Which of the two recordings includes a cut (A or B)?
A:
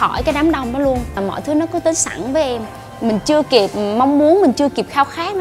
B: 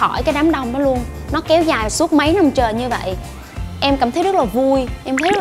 A